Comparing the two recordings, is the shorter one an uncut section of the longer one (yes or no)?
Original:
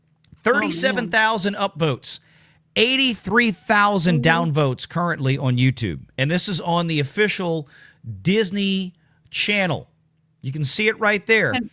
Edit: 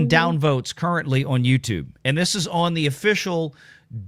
yes